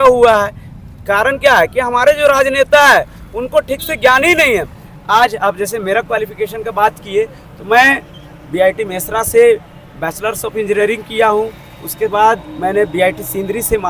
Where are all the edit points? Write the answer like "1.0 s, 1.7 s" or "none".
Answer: none